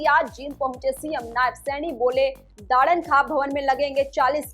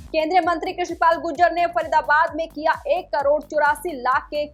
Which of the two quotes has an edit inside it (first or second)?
first